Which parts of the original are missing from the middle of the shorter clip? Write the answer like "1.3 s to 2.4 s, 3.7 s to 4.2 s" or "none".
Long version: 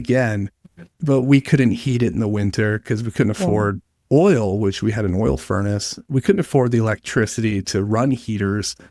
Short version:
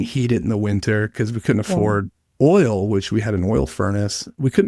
none